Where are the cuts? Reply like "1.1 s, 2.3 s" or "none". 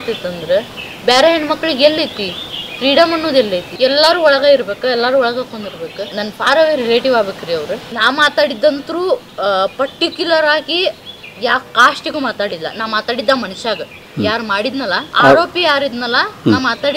3.7 s, 6.1 s, 7.8 s, 15.1 s